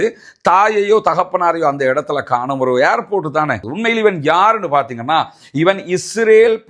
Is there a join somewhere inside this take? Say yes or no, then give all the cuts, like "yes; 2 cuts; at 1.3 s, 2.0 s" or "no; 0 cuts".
yes; 1 cut; at 3.7 s